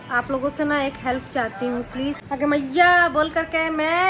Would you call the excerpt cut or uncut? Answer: cut